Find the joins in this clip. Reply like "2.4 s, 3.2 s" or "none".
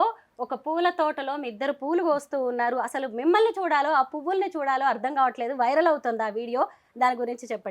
none